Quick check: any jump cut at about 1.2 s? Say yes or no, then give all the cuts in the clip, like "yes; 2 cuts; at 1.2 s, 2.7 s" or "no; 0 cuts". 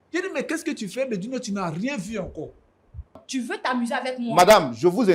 no; 1 cut; at 3.2 s